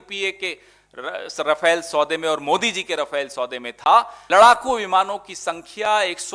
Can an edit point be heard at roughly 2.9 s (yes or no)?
no